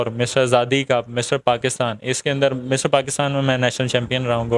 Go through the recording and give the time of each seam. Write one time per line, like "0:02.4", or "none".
none

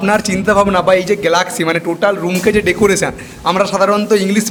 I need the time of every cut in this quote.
none

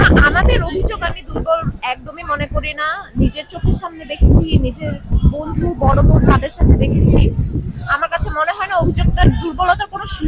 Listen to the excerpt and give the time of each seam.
none

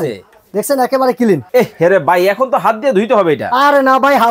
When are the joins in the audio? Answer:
0:01.4

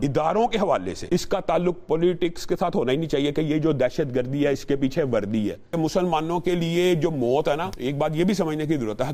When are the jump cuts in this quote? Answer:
0:00.9
0:05.7
0:07.7

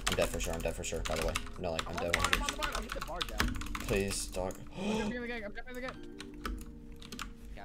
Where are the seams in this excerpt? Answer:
none

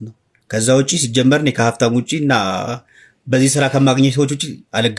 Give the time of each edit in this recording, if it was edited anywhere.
none

